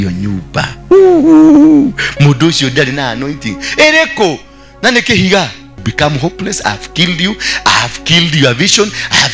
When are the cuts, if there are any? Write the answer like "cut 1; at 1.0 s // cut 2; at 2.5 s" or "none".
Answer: cut 1; at 5.9 s